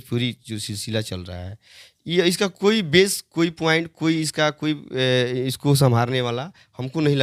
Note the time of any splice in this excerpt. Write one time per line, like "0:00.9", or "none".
none